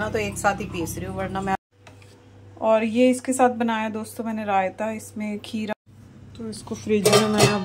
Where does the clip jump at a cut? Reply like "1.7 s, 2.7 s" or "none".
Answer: 1.5 s, 5.7 s